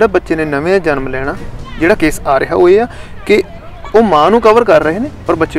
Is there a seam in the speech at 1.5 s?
no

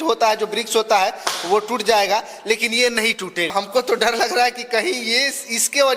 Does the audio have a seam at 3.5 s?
yes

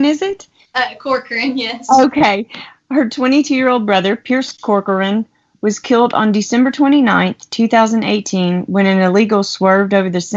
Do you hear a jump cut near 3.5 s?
no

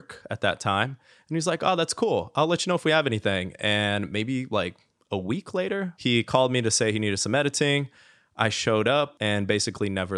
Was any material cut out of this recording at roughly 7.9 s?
no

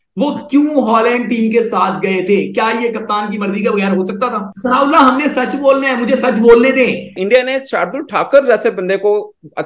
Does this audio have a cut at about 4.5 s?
yes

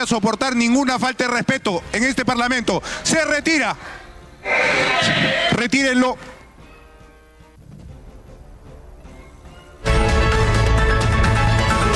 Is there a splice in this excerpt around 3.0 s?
no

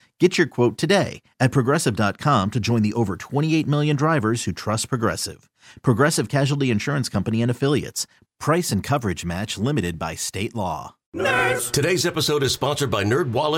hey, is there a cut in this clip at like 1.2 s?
no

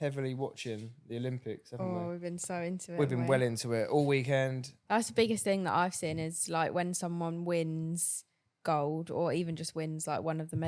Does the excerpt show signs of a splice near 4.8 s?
yes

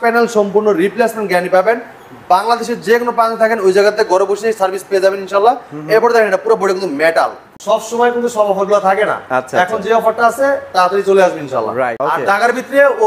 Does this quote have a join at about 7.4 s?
yes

